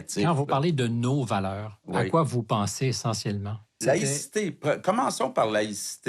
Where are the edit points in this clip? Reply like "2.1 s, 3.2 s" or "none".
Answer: 3.8 s